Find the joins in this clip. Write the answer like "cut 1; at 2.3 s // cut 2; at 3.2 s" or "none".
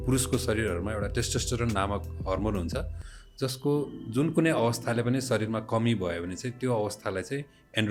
none